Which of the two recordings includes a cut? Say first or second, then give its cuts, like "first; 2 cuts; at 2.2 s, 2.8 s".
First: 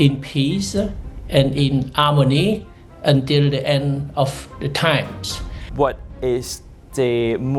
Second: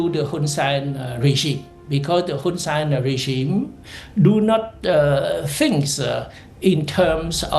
first; 1 cut; at 5.6 s